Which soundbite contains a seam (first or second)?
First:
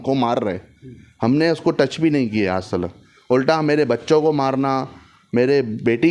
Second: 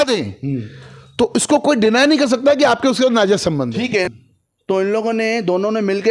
second